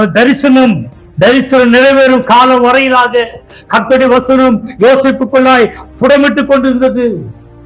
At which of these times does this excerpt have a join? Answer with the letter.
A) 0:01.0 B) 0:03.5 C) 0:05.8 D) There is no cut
A